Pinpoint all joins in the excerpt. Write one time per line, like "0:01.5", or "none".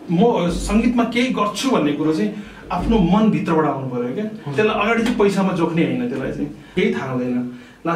0:06.7